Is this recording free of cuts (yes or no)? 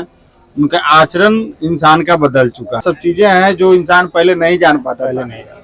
no